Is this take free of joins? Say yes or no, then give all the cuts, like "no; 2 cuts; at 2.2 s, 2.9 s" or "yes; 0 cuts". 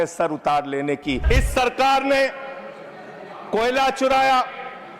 no; 1 cut; at 1.2 s